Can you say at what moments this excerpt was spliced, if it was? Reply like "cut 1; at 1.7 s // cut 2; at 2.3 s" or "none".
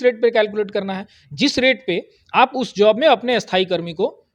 none